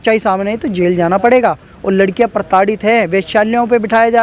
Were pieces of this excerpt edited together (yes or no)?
no